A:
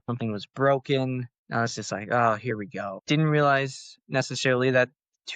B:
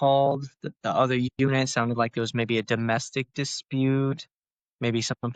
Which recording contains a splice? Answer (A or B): A